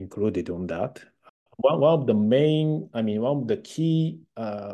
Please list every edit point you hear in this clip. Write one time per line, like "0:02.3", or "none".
0:01.3